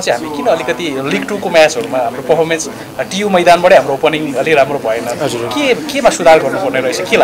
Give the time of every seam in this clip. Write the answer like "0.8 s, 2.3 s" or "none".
none